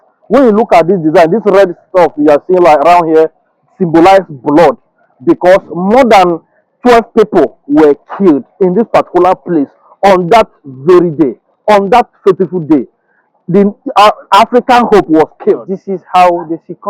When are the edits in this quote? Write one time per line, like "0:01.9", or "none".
0:15.7